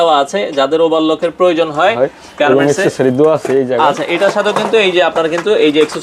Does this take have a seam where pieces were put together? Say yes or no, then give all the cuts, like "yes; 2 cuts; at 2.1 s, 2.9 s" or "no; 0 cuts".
no; 0 cuts